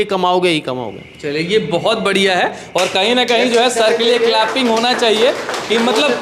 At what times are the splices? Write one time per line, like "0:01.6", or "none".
none